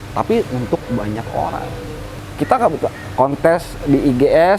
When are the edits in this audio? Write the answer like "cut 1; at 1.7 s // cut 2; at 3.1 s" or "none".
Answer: cut 1; at 2.2 s